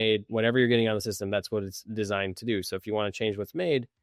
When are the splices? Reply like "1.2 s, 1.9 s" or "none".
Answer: none